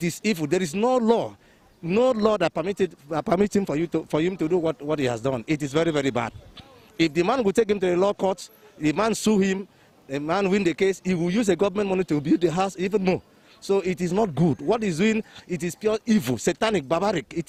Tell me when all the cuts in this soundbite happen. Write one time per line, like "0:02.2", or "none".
none